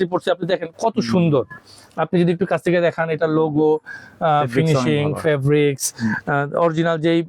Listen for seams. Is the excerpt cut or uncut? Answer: uncut